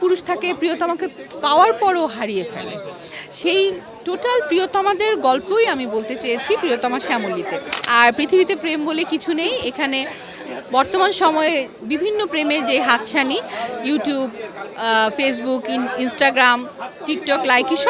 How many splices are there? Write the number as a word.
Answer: one